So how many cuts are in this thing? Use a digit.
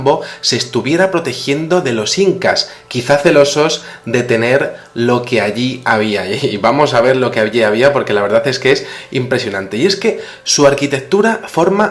1